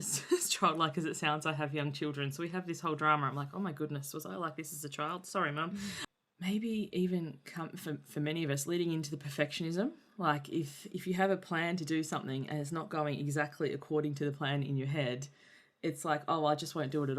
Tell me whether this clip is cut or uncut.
cut